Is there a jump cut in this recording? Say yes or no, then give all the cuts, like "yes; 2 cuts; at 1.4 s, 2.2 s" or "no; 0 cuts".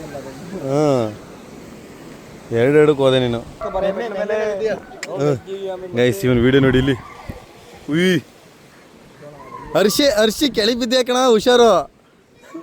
yes; 1 cut; at 3.6 s